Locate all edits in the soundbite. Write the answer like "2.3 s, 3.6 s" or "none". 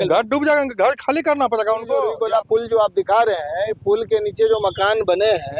2.1 s